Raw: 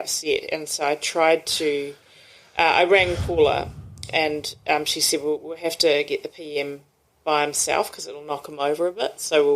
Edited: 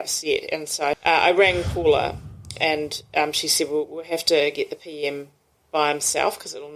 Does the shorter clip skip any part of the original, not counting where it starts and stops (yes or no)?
yes